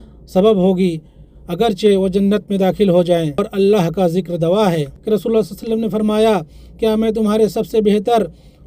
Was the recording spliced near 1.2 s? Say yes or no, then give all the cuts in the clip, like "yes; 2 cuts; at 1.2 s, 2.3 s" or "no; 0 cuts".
no; 2 cuts; at 3.5 s, 4.9 s